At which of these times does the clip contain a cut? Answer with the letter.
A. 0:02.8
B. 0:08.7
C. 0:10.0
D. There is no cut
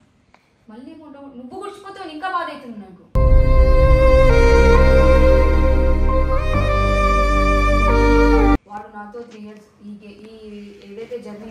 B